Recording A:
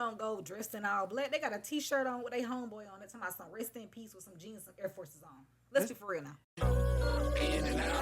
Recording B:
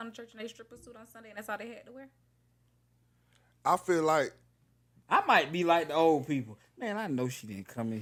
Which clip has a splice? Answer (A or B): A